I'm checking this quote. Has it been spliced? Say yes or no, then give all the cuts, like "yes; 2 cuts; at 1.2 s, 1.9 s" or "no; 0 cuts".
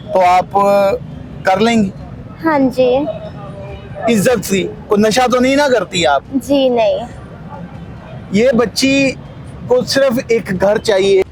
no; 0 cuts